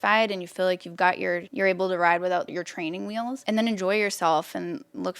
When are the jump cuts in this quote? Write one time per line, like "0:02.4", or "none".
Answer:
0:01.5
0:03.4